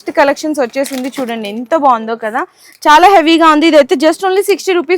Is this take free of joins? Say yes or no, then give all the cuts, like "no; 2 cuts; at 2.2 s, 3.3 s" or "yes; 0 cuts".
yes; 0 cuts